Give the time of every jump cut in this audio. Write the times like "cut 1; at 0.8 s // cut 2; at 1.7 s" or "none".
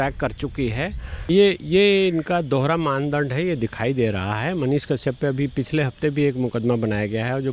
cut 1; at 1.3 s